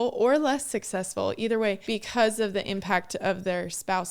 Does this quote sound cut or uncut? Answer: cut